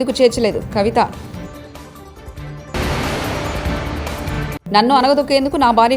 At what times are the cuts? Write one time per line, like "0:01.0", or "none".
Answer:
0:02.7
0:04.5